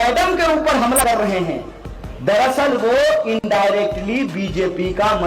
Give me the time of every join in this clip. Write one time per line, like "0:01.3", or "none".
0:01.0